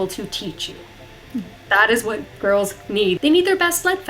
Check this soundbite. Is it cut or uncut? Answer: cut